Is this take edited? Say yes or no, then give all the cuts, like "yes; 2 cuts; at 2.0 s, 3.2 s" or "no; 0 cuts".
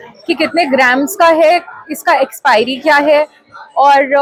no; 0 cuts